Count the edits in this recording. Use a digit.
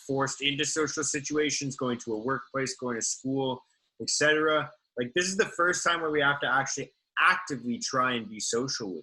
0